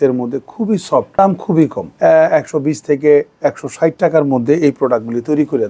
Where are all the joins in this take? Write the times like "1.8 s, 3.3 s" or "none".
1.1 s, 1.8 s